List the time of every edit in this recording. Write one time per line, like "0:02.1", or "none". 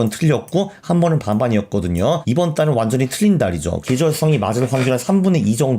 0:02.2
0:03.8